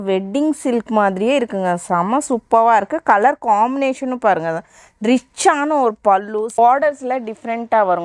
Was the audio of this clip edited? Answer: yes; 1 cut; at 6.6 s

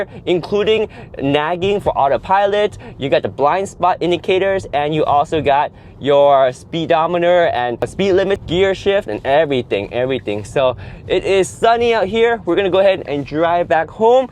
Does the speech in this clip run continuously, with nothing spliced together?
no; 1 cut; at 8.2 s

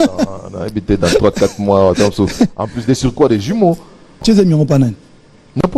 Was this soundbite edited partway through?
yes; 1 cut; at 4.2 s

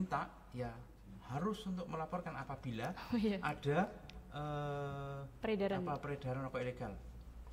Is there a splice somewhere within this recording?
no; 0 cuts

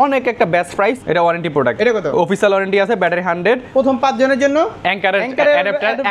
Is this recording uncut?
no; 2 cuts; at 1.0 s, 3.6 s

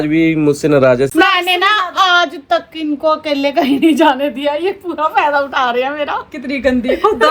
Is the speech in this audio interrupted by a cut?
yes; 1 cut; at 1.1 s

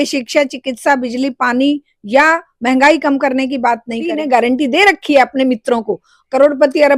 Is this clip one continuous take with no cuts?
no; 1 cut; at 4.2 s

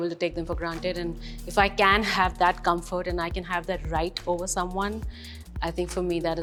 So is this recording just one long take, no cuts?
yes; 0 cuts

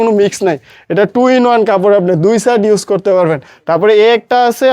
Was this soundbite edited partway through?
yes; 1 cut; at 3.5 s

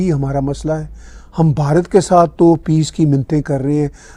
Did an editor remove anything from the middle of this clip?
no; 0 cuts

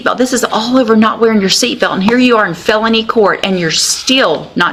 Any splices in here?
no; 0 cuts

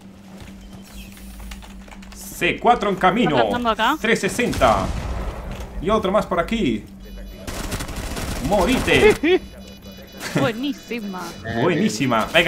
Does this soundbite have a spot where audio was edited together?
no; 0 cuts

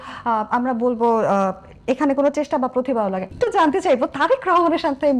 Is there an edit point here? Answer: yes; 1 cut; at 3.2 s

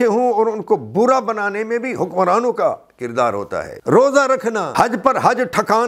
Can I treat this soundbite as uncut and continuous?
no; 2 cuts; at 3.7 s, 4.7 s

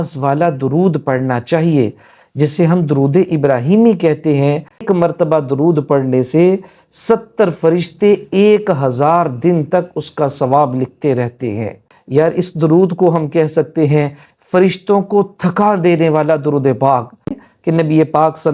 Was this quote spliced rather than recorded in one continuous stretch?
yes; 3 cuts; at 4.8 s, 11.9 s, 17.4 s

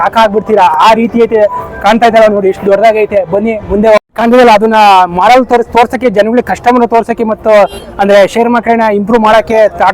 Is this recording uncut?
no; 1 cut; at 4.1 s

